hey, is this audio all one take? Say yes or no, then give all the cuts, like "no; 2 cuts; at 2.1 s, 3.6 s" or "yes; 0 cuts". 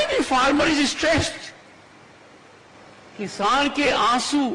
no; 1 cut; at 2.7 s